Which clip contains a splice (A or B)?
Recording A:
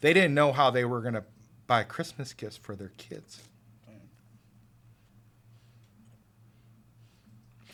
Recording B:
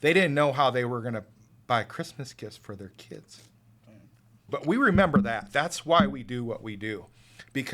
B